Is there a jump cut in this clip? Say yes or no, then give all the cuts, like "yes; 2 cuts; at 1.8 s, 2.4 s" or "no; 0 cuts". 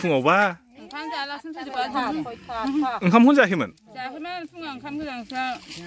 no; 0 cuts